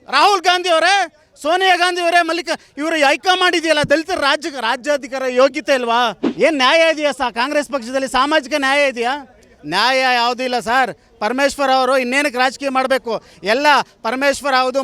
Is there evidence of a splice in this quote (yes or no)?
yes